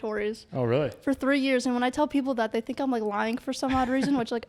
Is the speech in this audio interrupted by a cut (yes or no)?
no